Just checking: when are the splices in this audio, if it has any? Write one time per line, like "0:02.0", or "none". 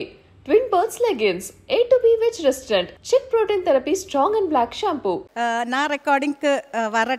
0:05.3